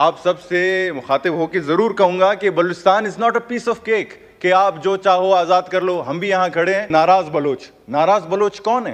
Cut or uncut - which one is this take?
cut